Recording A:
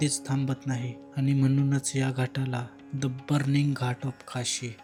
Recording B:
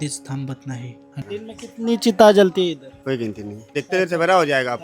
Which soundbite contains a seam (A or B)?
B